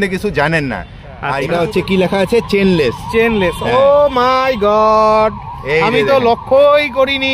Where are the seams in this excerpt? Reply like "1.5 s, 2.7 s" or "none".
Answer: 1.4 s

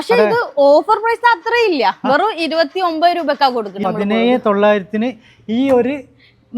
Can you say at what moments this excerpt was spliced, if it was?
3.8 s

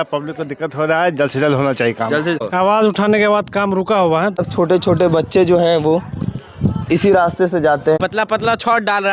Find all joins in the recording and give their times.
2.4 s, 4.5 s, 8.0 s

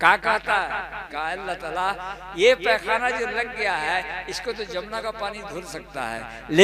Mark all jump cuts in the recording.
1.0 s

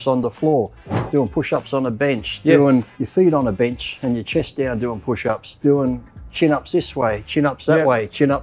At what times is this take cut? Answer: 3.0 s, 5.5 s

